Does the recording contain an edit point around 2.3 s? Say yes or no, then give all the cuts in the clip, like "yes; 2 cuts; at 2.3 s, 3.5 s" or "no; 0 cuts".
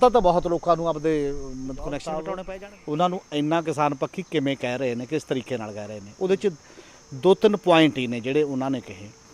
yes; 1 cut; at 2.3 s